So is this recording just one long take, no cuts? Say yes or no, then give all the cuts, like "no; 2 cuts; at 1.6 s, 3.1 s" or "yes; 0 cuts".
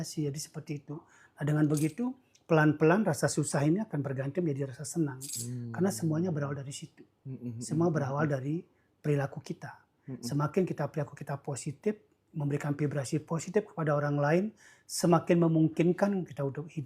yes; 0 cuts